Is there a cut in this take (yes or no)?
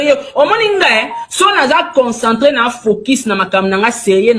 no